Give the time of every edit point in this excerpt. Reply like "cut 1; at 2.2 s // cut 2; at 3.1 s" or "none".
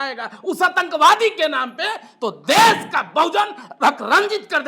none